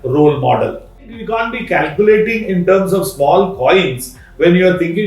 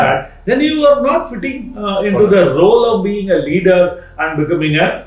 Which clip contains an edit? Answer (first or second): first